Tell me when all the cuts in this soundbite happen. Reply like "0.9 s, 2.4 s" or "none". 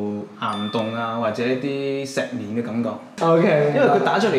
3.0 s